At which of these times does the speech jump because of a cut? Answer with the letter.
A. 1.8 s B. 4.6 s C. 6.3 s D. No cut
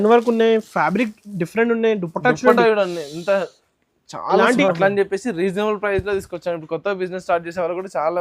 B